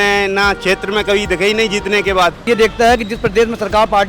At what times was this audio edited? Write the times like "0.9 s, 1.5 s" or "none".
2.5 s